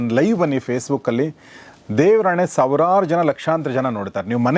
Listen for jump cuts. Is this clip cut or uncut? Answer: uncut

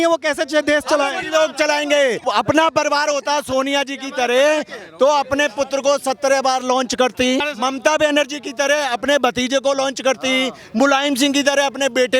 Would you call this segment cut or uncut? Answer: cut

